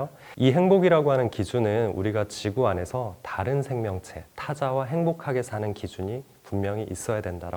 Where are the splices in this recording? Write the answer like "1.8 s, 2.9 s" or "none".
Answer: none